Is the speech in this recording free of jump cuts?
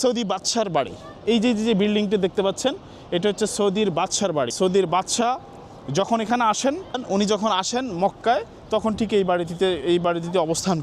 no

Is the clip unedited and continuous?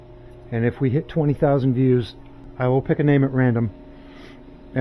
no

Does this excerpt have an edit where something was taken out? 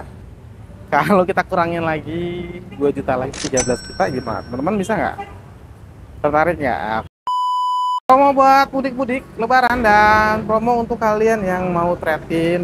yes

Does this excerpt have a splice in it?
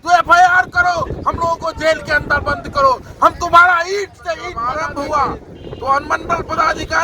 yes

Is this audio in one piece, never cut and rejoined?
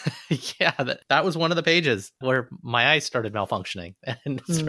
no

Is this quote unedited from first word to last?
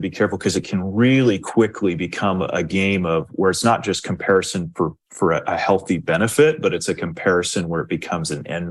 yes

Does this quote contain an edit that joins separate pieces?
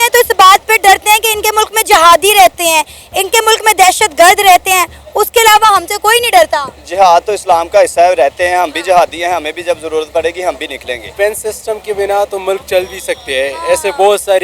yes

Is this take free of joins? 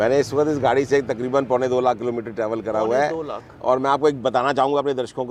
yes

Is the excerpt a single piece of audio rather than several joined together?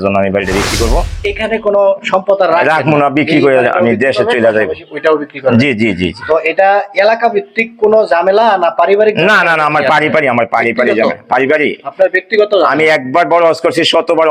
no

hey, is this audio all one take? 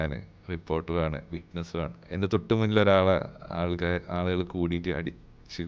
no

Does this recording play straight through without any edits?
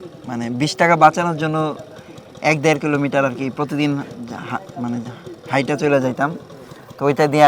yes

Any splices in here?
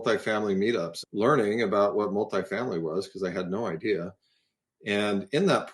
yes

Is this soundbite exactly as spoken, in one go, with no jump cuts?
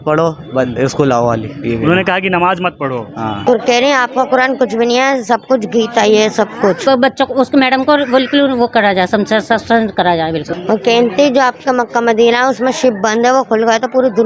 no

